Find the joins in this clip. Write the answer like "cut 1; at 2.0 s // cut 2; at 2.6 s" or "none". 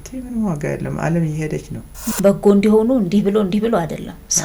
cut 1; at 2.1 s